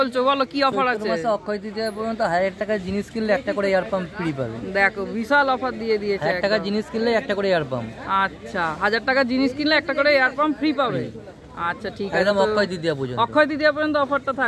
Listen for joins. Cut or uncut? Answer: uncut